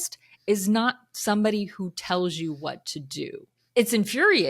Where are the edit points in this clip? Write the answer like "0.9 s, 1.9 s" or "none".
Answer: 3.6 s